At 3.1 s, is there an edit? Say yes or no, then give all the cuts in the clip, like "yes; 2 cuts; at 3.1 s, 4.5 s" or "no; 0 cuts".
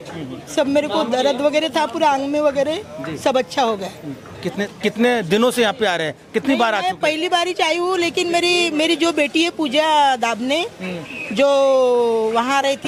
no; 0 cuts